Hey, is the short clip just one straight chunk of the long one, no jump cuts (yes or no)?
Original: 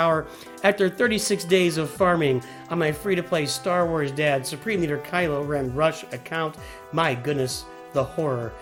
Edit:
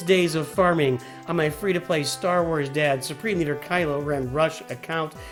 yes